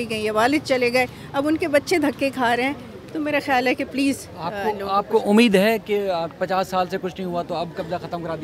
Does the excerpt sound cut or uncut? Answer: uncut